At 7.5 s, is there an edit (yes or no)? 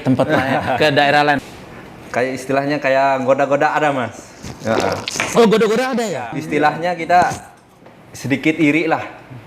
no